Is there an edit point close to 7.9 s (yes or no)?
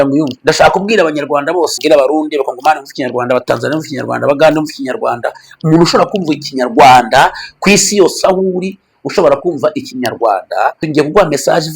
no